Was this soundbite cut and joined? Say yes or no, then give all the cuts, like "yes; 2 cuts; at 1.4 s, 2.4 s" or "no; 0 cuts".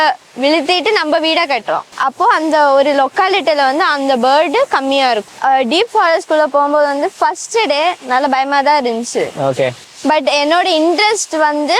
yes; 2 cuts; at 1.9 s, 5.3 s